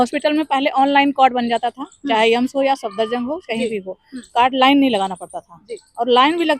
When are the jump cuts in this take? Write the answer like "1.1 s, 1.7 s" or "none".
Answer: none